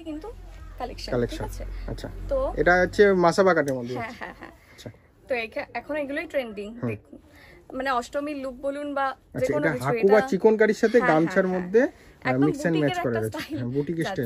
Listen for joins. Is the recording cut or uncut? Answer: uncut